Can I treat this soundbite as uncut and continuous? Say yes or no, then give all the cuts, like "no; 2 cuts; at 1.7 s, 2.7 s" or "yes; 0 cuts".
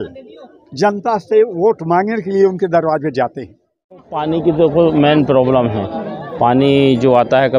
no; 1 cut; at 4.0 s